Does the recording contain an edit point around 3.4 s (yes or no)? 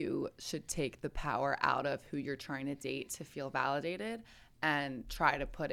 no